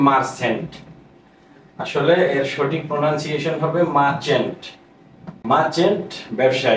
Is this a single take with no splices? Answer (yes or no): yes